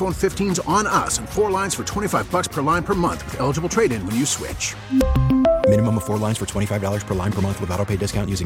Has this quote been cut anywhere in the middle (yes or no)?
no